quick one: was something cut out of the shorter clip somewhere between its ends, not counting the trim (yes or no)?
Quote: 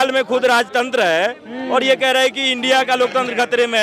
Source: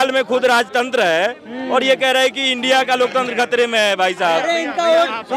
no